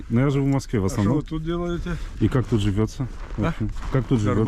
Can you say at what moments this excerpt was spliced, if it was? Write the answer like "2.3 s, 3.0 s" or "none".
2.0 s